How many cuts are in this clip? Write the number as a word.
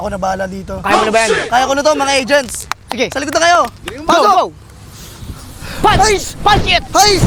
zero